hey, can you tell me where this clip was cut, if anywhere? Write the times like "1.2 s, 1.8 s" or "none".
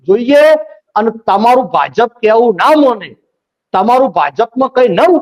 none